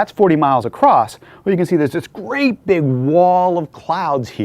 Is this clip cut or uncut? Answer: cut